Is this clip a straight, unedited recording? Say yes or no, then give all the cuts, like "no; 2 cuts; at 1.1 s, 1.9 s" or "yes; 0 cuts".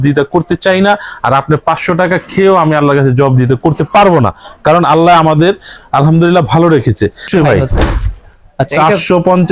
no; 1 cut; at 7.3 s